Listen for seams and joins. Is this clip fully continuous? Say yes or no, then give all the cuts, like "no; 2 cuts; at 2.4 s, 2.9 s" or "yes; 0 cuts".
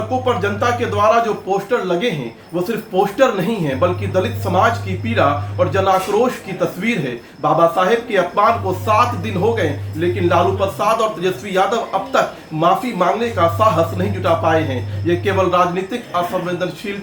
yes; 0 cuts